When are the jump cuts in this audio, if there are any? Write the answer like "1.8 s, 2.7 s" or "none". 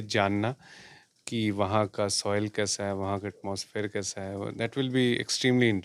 none